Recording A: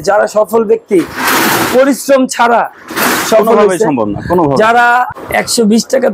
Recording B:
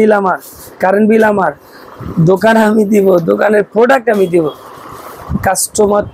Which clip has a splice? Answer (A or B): A